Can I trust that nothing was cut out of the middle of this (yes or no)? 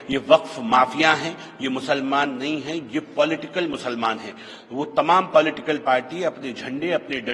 yes